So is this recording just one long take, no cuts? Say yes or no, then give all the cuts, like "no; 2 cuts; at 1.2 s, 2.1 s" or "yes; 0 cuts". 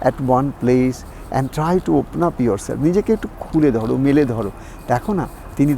yes; 0 cuts